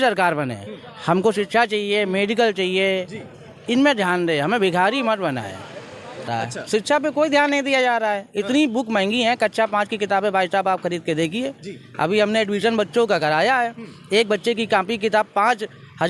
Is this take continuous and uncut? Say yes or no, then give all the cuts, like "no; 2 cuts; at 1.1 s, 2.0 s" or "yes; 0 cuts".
no; 1 cut; at 6.2 s